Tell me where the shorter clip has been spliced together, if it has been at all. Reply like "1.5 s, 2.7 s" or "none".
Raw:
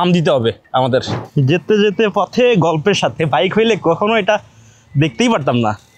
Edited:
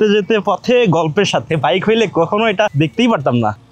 2.7 s